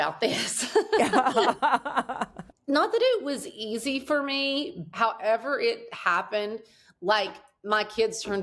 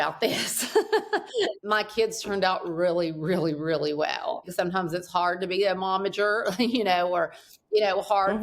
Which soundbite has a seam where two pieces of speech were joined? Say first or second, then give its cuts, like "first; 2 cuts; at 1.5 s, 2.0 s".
second; 2 cuts; at 1.2 s, 4.5 s